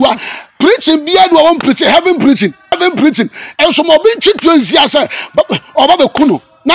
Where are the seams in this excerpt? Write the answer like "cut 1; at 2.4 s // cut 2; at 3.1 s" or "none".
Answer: cut 1; at 2.7 s